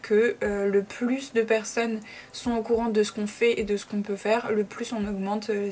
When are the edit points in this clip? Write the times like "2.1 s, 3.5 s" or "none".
none